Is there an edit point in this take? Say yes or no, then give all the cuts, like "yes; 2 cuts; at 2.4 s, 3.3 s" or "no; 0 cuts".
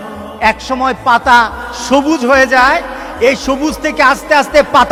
no; 0 cuts